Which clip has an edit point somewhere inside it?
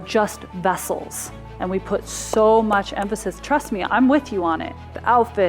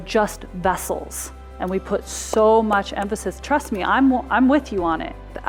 first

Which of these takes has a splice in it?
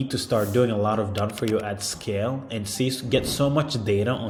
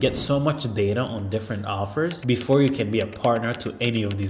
second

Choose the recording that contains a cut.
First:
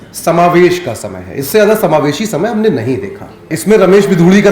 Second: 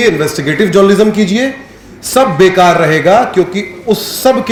first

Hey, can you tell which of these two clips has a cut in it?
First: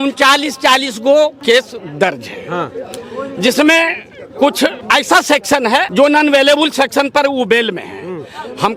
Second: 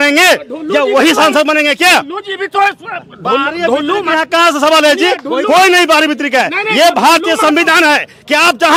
first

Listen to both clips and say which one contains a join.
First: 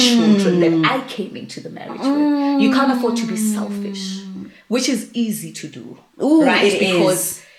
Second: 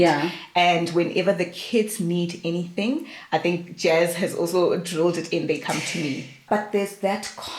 second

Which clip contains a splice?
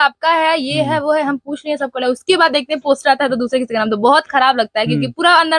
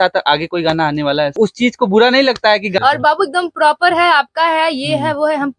second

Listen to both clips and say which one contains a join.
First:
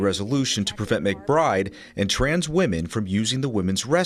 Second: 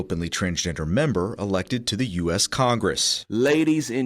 second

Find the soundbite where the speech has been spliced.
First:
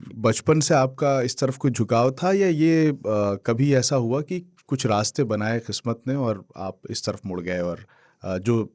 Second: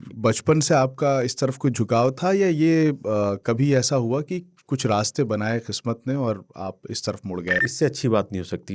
second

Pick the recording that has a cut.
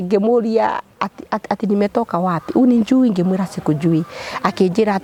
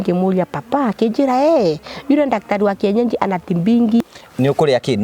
second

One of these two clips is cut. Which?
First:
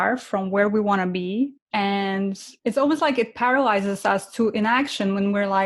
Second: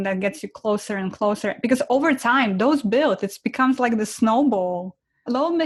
first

